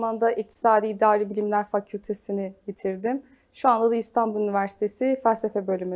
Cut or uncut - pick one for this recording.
uncut